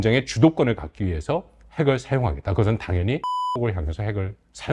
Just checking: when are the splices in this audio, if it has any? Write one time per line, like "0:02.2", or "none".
0:03.5